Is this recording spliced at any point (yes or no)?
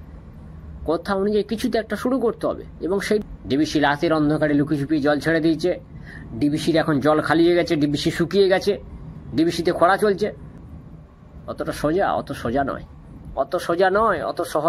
yes